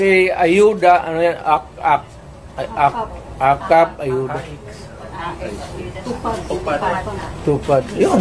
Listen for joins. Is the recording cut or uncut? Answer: uncut